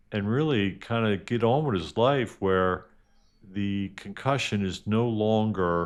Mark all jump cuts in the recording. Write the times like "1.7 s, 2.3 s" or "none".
none